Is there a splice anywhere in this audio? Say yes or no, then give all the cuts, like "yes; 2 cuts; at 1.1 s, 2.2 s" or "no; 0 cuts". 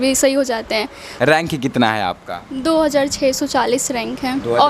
yes; 1 cut; at 1.0 s